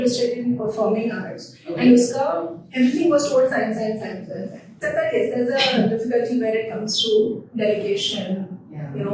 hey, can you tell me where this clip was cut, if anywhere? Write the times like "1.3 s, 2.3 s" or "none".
4.8 s